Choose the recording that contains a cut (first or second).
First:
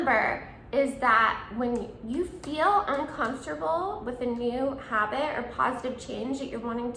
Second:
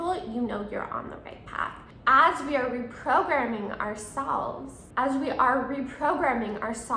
second